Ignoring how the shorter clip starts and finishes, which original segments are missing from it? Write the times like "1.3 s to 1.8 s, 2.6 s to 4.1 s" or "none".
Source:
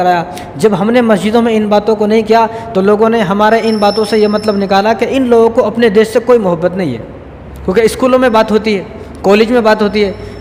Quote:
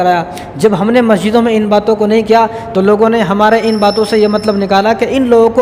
none